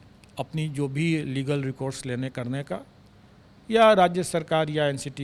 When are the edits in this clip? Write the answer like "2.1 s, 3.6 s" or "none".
none